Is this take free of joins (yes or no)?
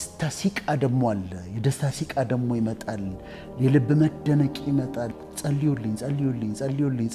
no